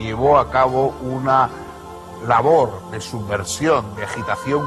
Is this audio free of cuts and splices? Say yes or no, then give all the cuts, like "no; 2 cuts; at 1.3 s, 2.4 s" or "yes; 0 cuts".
yes; 0 cuts